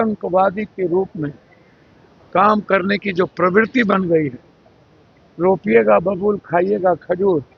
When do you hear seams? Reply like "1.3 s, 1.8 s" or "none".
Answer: none